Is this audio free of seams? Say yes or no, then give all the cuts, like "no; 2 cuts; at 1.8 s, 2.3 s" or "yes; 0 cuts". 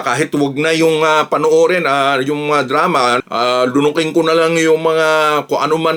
yes; 0 cuts